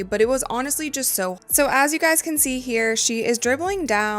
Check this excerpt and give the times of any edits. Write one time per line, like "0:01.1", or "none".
0:01.4